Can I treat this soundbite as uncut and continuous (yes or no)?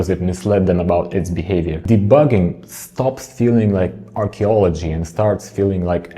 no